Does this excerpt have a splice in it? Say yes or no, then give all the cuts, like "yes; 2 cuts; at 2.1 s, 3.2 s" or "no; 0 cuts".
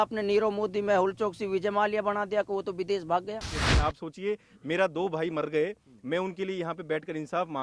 yes; 1 cut; at 3.6 s